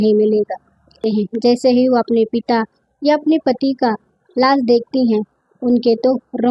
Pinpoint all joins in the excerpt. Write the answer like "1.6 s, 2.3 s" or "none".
1.0 s